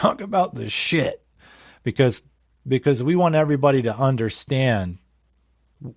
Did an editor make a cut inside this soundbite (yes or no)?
no